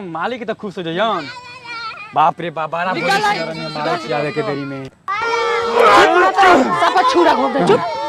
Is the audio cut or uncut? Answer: cut